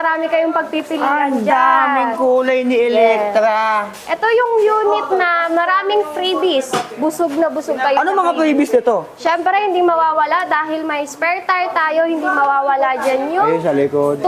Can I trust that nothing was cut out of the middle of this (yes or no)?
yes